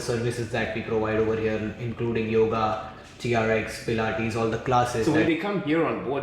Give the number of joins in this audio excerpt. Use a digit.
1